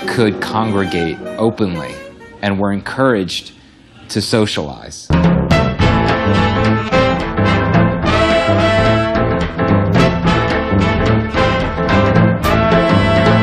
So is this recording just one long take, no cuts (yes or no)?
no